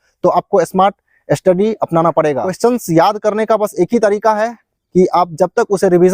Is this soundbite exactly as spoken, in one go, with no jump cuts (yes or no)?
no